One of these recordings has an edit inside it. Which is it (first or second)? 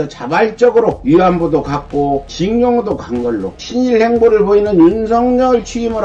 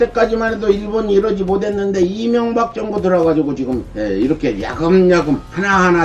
first